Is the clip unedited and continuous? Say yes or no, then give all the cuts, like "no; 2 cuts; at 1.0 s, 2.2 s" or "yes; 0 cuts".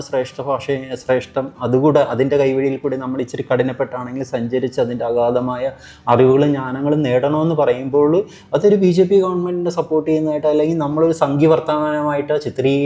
yes; 0 cuts